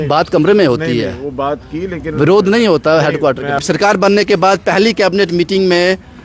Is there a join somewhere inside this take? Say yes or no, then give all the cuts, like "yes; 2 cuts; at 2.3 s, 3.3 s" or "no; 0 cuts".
yes; 1 cut; at 3.6 s